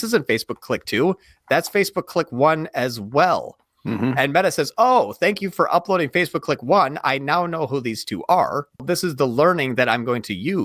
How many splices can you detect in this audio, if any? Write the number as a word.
one